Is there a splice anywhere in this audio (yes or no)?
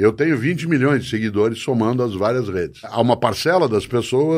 yes